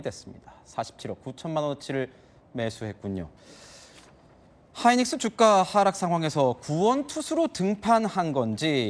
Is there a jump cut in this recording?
yes; 1 cut; at 7.1 s

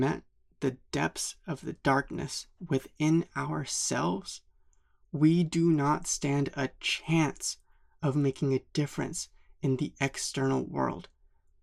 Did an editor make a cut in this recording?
no; 0 cuts

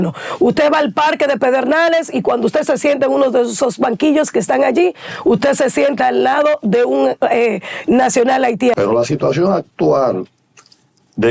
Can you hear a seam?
yes; 1 cut; at 8.8 s

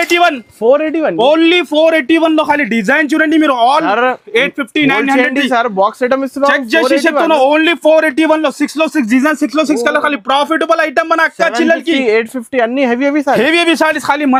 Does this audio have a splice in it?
no; 0 cuts

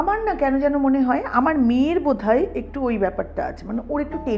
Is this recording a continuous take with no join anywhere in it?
yes; 0 cuts

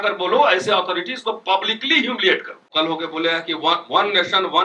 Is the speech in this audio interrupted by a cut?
yes; 1 cut; at 2.6 s

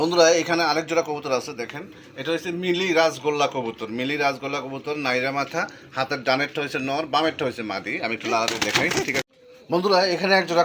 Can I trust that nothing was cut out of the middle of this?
no; 1 cut; at 9.3 s

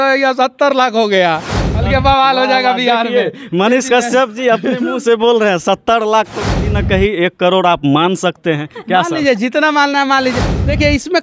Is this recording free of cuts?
yes; 0 cuts

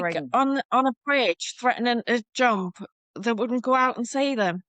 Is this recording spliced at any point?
no; 0 cuts

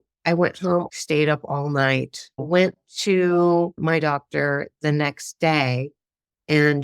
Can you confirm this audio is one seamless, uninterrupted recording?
no; 3 cuts; at 0.9 s, 2.3 s, 3.8 s

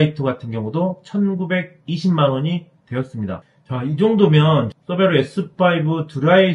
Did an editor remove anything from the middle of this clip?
no; 0 cuts

